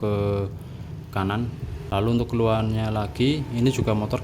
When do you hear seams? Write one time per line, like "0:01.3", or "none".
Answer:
0:01.8